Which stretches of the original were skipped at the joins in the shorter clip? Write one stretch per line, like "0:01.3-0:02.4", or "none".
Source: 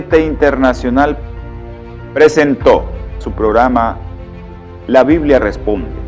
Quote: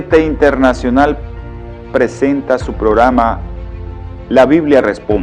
0:02.2-0:02.8